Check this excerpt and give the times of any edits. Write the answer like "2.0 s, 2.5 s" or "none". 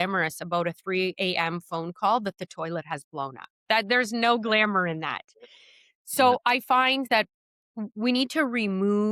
none